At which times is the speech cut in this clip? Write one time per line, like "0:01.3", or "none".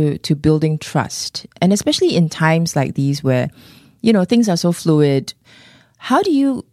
0:01.5
0:05.4